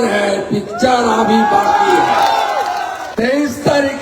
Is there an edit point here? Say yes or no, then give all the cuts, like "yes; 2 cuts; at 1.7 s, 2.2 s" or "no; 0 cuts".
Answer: yes; 1 cut; at 3.0 s